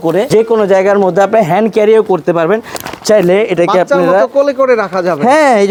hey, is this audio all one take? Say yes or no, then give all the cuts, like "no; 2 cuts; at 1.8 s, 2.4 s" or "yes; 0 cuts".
yes; 0 cuts